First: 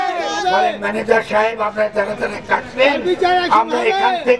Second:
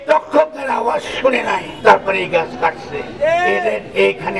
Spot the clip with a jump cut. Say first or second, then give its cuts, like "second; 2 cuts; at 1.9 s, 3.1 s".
second; 1 cut; at 1.7 s